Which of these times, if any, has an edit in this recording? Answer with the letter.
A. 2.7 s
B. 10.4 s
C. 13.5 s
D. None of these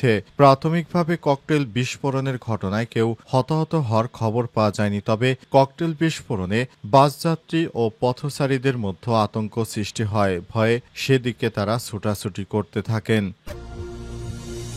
C